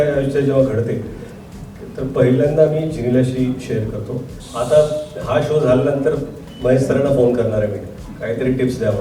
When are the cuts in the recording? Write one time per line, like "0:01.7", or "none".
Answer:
0:04.4